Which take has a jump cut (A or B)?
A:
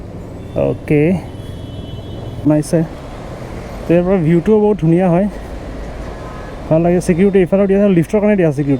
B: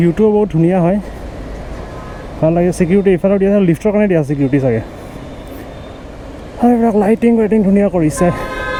A